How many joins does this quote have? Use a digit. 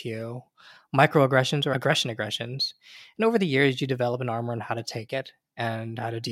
2